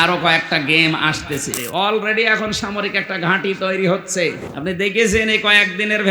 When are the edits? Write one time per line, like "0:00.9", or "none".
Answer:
0:01.6
0:04.5